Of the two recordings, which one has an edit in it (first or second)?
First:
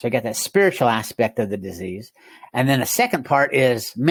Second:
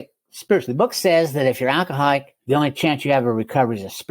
second